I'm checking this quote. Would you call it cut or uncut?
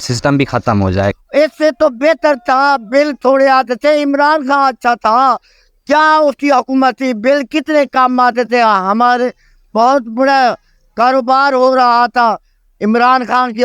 cut